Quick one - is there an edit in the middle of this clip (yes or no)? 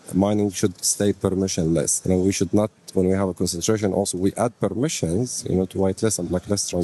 yes